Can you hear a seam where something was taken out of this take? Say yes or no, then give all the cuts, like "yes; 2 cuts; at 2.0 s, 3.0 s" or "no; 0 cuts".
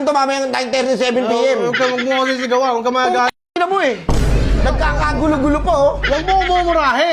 no; 0 cuts